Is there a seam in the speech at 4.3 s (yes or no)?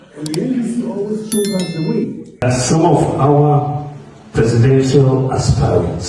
no